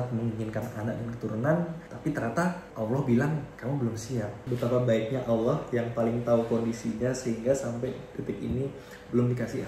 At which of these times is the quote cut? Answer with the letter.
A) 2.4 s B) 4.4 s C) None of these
B